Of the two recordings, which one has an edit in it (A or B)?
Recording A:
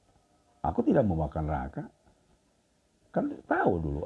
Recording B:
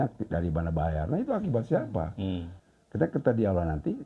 B